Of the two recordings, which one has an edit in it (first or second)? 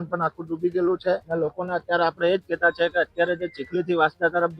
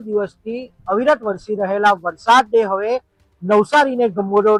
first